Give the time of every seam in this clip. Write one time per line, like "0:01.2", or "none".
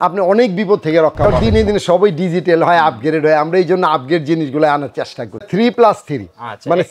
0:01.3
0:05.5